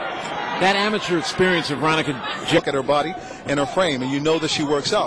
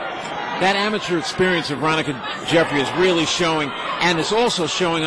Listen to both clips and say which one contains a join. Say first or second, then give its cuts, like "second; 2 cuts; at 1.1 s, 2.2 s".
second; 1 cut; at 2.6 s